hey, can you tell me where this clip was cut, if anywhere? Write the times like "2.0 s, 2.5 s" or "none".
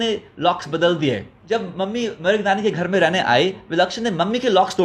1.4 s